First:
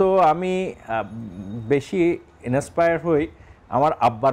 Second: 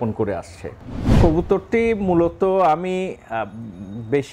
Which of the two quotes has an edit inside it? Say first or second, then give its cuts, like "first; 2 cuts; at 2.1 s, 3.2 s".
second; 1 cut; at 1.2 s